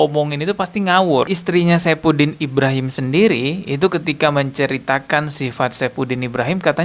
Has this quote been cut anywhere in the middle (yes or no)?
yes